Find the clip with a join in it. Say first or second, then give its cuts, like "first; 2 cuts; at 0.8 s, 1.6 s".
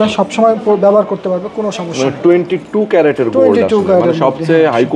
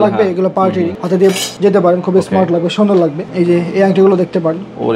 second; 2 cuts; at 1.3 s, 3.2 s